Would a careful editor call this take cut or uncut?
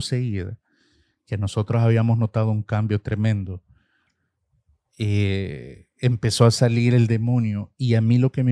uncut